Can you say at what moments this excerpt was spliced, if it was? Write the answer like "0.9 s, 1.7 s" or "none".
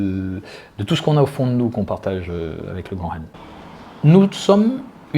3.4 s